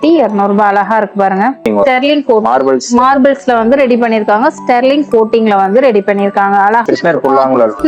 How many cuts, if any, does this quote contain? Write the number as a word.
two